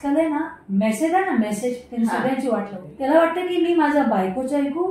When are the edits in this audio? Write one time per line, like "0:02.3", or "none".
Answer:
0:02.8